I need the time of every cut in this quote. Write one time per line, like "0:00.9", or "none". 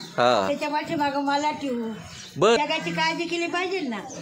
0:02.6